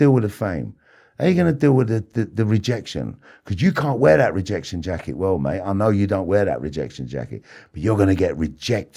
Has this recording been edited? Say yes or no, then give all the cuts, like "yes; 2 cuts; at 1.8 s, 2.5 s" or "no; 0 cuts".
no; 0 cuts